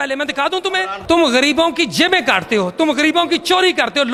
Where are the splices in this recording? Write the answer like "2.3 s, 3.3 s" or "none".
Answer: none